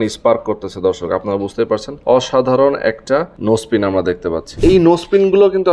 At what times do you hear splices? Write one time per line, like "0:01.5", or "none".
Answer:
0:01.9
0:03.3
0:04.5